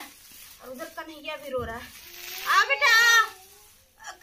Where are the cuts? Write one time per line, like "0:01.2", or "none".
none

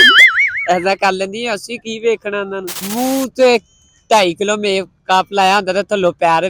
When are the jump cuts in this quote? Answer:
0:02.9

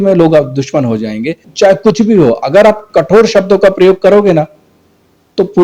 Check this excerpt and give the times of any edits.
0:01.4

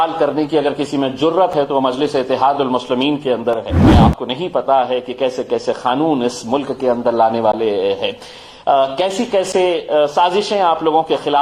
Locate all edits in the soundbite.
0:03.9

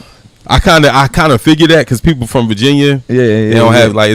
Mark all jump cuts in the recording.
0:03.0

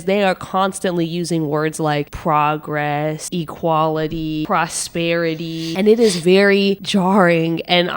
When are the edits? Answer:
0:03.2
0:04.4
0:05.7

